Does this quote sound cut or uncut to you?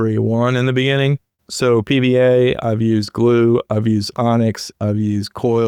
uncut